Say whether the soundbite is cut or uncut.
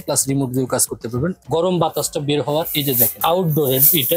cut